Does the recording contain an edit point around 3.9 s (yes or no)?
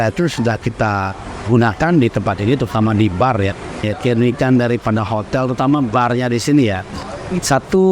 yes